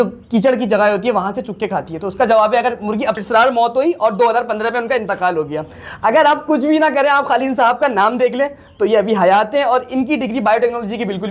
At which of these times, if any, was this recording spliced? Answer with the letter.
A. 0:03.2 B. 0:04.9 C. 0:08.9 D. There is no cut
A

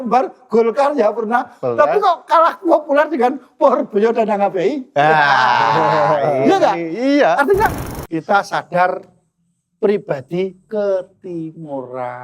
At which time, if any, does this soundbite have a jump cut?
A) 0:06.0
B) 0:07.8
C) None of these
B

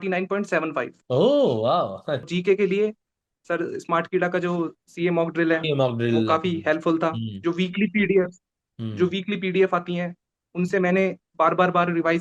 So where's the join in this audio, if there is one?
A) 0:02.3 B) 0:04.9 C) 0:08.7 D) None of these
A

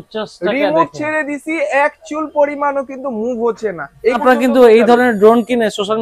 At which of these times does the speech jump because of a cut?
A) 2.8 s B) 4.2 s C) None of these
B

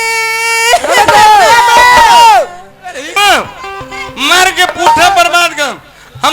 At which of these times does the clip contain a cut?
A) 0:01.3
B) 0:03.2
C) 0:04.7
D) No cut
B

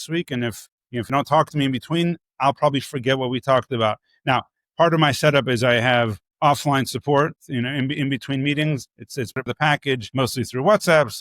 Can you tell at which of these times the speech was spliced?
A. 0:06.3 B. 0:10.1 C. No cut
B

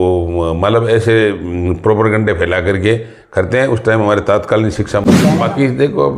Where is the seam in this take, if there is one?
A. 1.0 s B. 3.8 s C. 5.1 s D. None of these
C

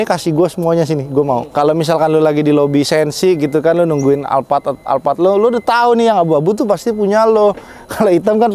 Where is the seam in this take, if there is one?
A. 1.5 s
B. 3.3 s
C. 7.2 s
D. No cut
A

